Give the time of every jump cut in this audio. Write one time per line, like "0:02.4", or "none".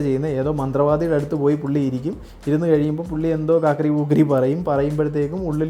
none